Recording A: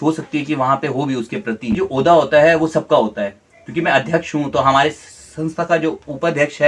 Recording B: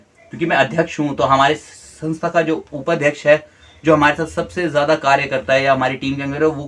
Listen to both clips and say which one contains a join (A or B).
A